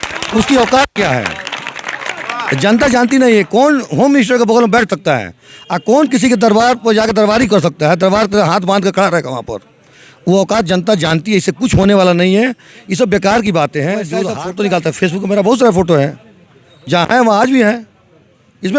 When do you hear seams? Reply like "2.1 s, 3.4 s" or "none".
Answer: 14.3 s